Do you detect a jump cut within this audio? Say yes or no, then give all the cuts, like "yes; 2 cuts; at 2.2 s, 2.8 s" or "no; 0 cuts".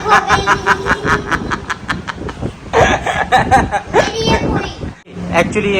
no; 0 cuts